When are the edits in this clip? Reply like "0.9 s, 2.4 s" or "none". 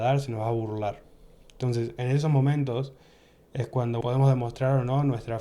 4.0 s